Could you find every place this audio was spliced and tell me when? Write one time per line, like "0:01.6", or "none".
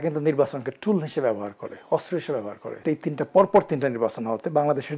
0:02.7